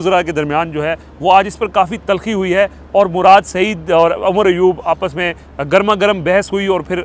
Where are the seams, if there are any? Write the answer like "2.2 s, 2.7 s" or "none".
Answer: none